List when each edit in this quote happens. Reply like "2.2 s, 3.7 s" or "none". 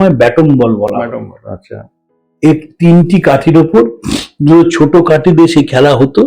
none